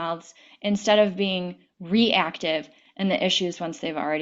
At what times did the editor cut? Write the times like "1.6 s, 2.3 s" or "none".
2.8 s

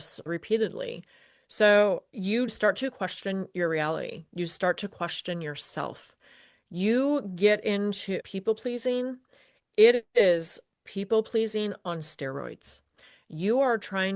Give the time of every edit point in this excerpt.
2.5 s, 8.2 s

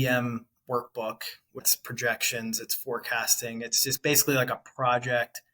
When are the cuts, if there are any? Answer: 1.7 s

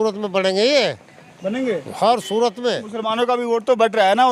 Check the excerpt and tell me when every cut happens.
2.9 s

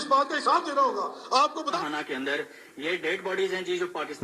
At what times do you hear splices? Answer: 1.8 s

